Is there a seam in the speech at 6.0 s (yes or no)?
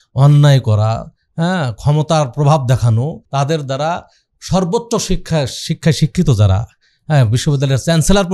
no